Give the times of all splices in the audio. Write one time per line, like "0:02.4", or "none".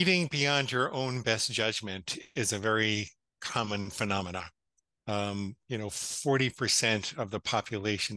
none